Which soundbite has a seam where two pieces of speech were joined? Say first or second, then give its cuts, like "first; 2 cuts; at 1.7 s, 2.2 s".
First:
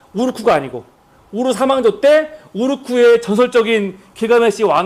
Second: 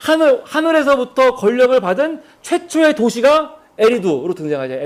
second; 1 cut; at 3.2 s